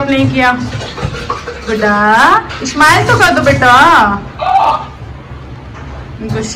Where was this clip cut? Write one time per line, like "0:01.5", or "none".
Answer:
none